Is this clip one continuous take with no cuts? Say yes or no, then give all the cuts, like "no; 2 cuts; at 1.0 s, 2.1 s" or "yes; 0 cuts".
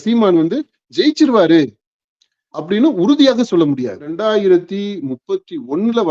no; 1 cut; at 4.2 s